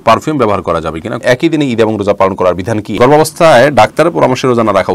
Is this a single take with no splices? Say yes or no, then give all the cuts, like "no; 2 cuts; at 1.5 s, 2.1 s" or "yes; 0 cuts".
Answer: no; 2 cuts; at 1.2 s, 3.0 s